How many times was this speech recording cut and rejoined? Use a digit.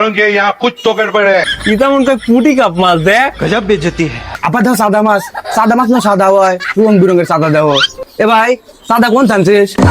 2